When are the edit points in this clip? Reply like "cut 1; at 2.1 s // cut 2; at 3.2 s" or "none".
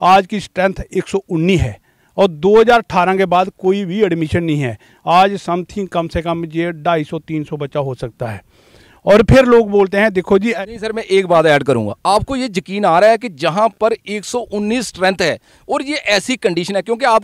cut 1; at 10.5 s